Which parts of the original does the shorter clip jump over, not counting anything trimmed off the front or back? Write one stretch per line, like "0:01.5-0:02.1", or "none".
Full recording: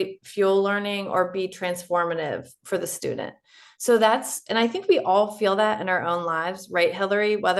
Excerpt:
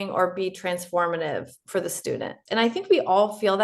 0:03.3-0:04.4